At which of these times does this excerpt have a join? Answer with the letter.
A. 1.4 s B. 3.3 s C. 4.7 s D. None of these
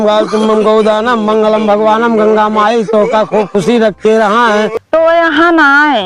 C